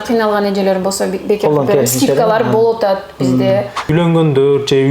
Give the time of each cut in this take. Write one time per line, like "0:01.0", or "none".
0:03.9